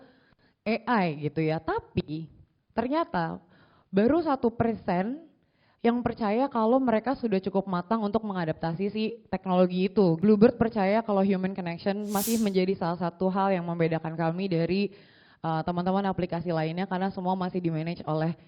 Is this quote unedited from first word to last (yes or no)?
no